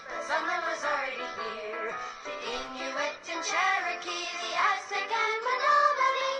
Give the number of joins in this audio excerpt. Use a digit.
0